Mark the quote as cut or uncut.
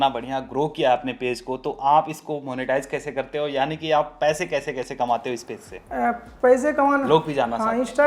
uncut